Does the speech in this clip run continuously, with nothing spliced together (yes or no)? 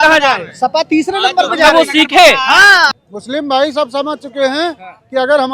no